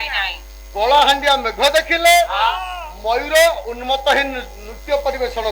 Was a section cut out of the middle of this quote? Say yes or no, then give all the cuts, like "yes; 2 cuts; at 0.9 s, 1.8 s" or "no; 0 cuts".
no; 0 cuts